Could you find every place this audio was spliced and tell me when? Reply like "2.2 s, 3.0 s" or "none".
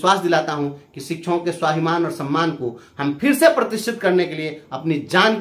none